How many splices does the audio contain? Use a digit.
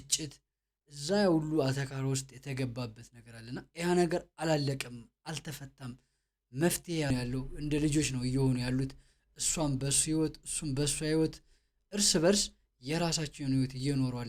1